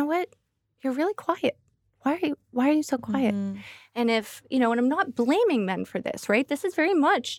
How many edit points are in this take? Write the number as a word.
zero